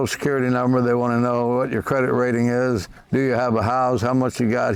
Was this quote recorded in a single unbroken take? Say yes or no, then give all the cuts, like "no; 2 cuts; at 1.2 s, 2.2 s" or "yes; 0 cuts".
yes; 0 cuts